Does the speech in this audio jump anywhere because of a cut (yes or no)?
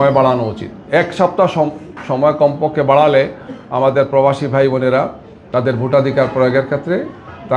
no